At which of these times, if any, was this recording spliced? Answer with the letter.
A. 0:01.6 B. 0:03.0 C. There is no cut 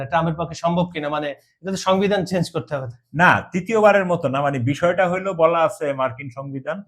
C